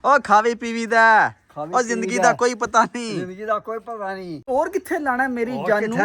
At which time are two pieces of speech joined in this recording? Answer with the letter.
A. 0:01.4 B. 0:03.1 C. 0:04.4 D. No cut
C